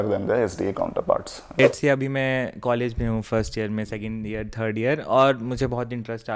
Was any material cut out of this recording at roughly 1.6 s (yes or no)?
yes